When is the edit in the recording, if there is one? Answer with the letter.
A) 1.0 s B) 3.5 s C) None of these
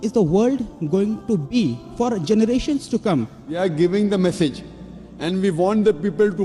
B